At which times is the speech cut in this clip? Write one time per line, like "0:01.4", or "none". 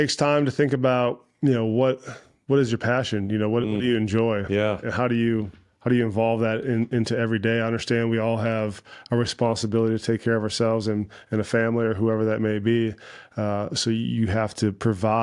none